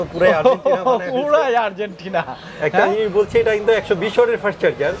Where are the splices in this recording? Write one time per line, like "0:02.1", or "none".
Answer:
none